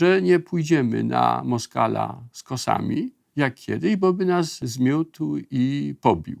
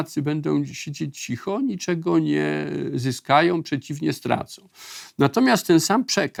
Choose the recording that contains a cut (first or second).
first